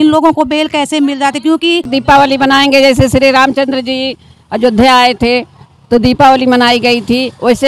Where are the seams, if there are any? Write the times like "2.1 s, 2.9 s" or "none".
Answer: 1.9 s